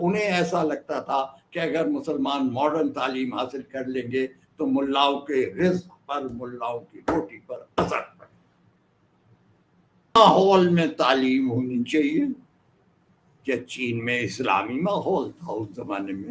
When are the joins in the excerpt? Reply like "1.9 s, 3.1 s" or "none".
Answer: 10.1 s